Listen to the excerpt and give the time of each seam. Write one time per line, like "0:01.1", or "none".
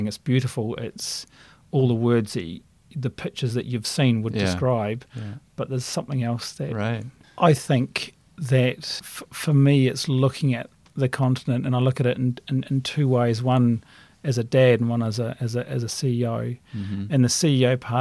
0:07.1